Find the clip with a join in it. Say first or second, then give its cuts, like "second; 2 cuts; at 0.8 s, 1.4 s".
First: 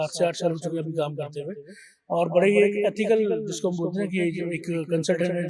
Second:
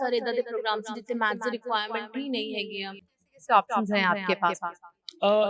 second; 1 cut; at 3.2 s